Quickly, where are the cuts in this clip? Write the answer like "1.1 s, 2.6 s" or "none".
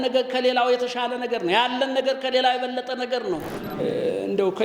3.5 s